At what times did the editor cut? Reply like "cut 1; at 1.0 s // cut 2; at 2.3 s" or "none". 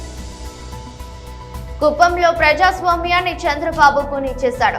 none